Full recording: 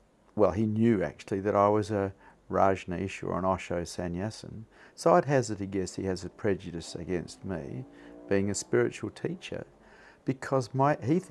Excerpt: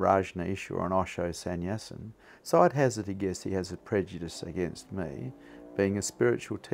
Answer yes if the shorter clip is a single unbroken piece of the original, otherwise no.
yes